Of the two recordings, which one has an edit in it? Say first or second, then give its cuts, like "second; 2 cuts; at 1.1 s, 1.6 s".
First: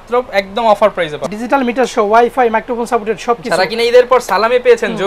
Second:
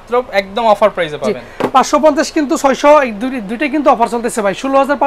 first; 1 cut; at 1.3 s